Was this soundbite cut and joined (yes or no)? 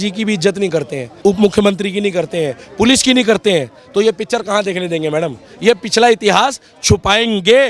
no